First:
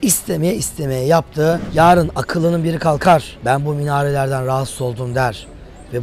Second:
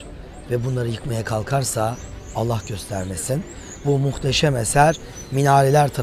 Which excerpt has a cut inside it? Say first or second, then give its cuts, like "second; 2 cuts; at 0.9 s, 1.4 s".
first; 1 cut; at 1.6 s